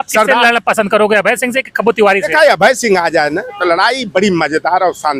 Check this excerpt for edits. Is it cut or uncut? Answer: uncut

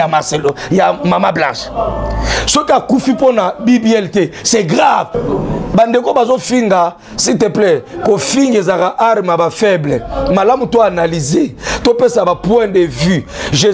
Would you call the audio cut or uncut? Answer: cut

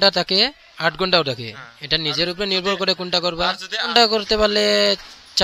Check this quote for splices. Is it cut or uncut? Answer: cut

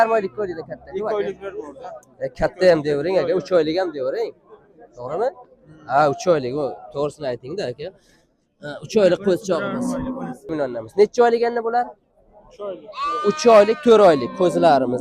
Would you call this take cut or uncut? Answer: cut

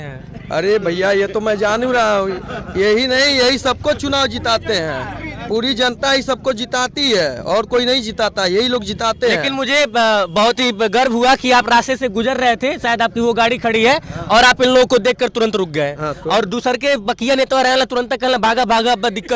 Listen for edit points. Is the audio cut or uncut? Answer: uncut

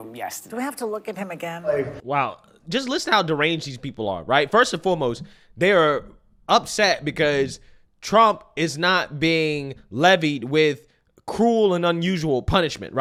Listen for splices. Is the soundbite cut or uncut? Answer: uncut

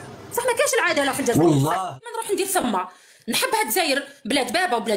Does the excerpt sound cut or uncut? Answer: cut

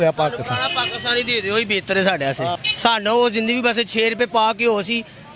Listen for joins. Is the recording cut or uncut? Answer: cut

